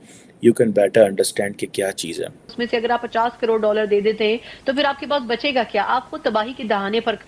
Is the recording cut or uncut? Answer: cut